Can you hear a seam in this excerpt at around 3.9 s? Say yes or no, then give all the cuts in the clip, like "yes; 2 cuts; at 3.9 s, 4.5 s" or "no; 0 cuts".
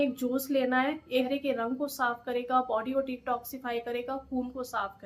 no; 1 cut; at 1.3 s